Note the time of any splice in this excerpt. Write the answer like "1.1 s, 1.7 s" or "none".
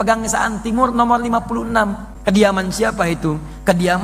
2.1 s